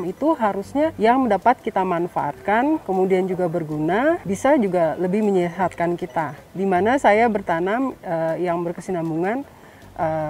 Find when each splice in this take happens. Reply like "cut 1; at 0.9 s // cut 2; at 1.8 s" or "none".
cut 1; at 0.9 s // cut 2; at 2.8 s // cut 3; at 4.2 s // cut 4; at 6.4 s

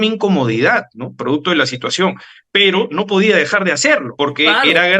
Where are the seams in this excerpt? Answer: cut 1; at 4.1 s

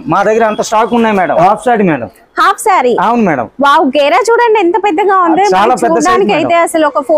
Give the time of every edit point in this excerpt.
cut 1; at 1.5 s

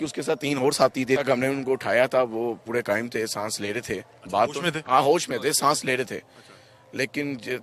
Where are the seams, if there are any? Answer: cut 1; at 1.2 s

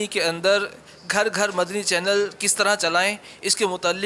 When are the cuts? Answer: none

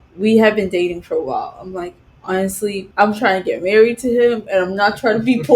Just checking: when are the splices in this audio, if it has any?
cut 1; at 2.8 s

